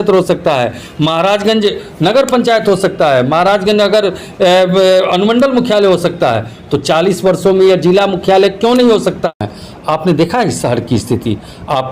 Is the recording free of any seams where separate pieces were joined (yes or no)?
no